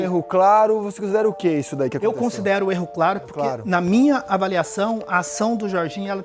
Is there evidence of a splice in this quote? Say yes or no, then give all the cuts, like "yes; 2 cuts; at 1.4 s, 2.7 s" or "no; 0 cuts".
no; 0 cuts